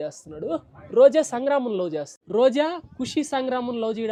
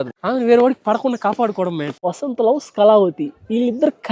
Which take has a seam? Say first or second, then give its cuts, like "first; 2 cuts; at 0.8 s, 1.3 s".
second; 1 cut; at 1.9 s